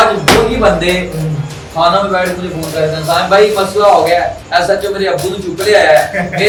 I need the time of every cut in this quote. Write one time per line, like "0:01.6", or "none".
none

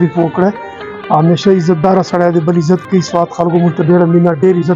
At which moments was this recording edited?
none

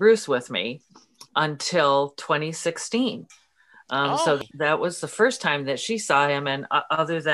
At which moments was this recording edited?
0:04.4

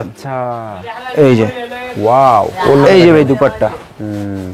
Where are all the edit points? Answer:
0:02.5

